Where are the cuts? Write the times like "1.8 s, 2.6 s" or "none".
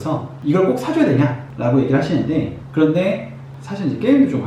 2.6 s